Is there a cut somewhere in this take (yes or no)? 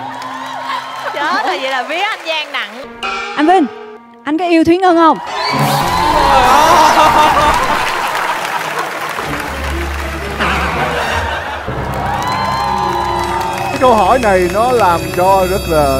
yes